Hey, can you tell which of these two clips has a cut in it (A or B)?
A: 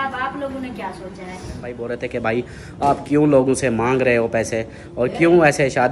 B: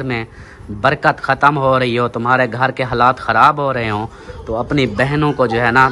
A